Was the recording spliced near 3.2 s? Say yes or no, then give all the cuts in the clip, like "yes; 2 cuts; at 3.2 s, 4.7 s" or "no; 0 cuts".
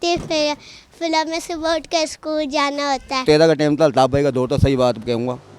yes; 1 cut; at 3.2 s